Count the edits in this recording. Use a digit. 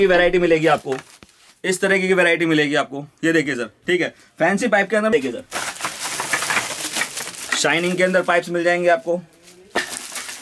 1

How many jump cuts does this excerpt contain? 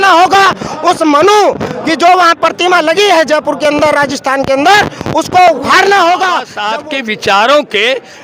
1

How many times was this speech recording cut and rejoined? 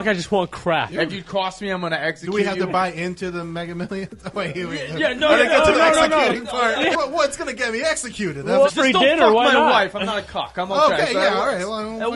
3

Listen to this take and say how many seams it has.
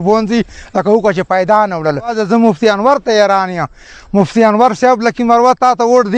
1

